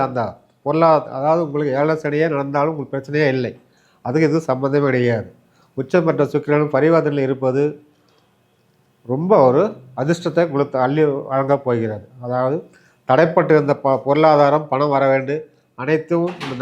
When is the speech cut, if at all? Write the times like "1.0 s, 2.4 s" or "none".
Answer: none